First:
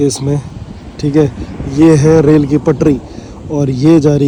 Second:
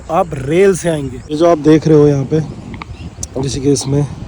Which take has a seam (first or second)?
second